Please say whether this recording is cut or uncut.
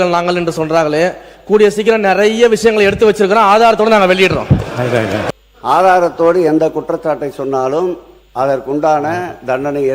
cut